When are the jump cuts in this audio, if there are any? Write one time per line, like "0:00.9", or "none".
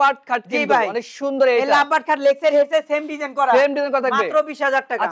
none